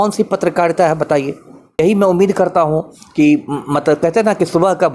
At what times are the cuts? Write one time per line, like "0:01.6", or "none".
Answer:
0:01.8